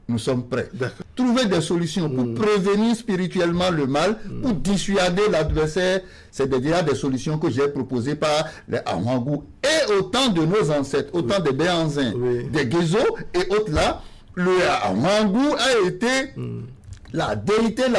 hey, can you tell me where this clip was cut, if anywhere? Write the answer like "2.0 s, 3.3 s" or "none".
1.0 s